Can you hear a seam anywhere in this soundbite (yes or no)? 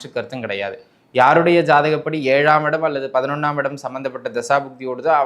no